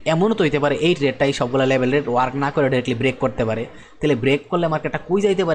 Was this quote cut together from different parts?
no; 0 cuts

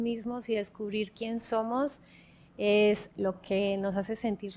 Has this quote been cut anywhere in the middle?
no; 0 cuts

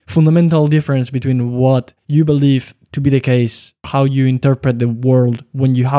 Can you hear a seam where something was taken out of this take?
yes; 2 cuts; at 2.0 s, 3.9 s

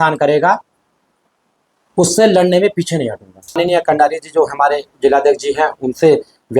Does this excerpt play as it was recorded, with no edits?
no; 1 cut; at 3.6 s

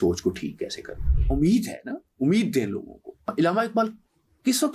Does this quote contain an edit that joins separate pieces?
yes; 2 cuts; at 1.1 s, 3.3 s

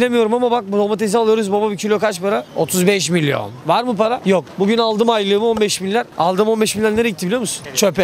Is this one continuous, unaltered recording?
yes; 0 cuts

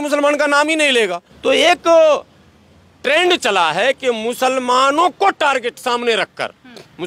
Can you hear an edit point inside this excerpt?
yes; 1 cut; at 0.9 s

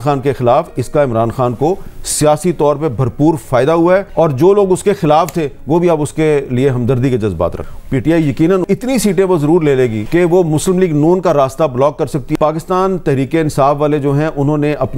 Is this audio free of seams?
no; 4 cuts; at 4.1 s, 7.6 s, 10.0 s, 12.3 s

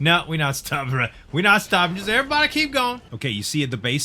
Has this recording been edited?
yes; 1 cut; at 3.1 s

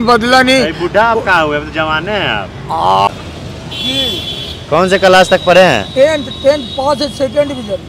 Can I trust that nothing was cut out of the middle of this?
no; 1 cut; at 3.1 s

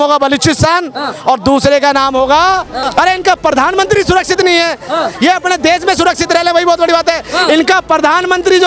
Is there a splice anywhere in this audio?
yes; 1 cut; at 2.8 s

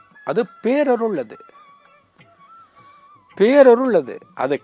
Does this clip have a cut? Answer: no; 0 cuts

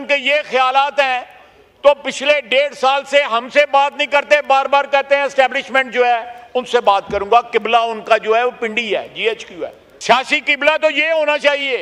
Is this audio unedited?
yes; 0 cuts

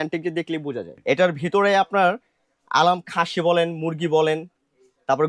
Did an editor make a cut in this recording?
yes; 1 cut; at 0.9 s

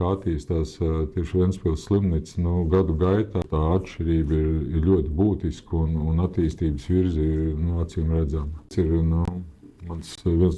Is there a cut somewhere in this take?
yes; 2 cuts; at 3.5 s, 8.7 s

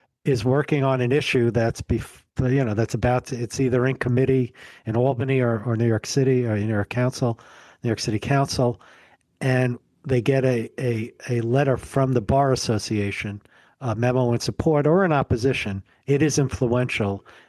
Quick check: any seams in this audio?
no; 0 cuts

